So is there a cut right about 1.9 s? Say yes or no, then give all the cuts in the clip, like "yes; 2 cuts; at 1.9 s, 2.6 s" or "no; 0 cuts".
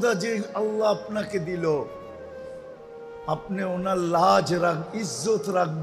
yes; 2 cuts; at 1.9 s, 3.2 s